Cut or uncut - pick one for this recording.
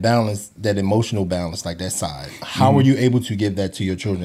uncut